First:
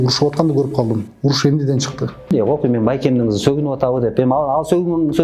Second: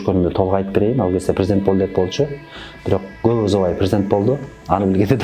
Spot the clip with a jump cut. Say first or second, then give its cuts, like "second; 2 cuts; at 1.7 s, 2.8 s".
first; 1 cut; at 2.3 s